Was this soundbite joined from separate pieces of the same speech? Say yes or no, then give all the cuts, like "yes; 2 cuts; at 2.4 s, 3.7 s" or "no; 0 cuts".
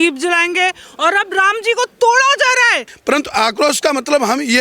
yes; 1 cut; at 2.9 s